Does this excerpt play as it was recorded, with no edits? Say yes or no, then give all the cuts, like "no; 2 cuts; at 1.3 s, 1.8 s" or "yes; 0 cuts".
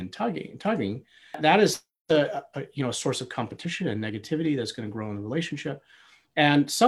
yes; 0 cuts